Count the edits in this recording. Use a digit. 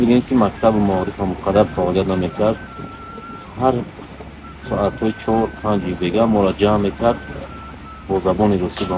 0